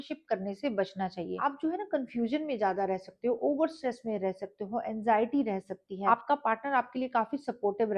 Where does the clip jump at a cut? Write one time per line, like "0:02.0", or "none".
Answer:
0:01.3
0:05.9